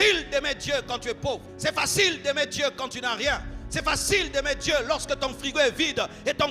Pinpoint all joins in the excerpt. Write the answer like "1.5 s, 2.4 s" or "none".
1.5 s